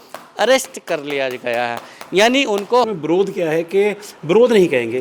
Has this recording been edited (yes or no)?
yes